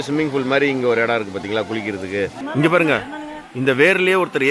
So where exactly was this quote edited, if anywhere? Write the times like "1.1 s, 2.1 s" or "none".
2.4 s